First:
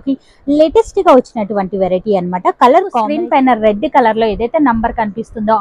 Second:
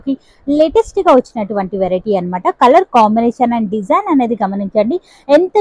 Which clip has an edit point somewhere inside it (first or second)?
first